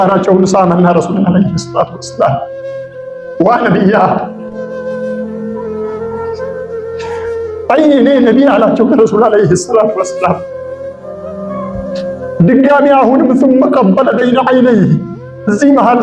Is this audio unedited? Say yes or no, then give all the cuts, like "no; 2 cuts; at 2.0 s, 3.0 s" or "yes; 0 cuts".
no; 4 cuts; at 4.3 s, 7.4 s, 10.4 s, 12.4 s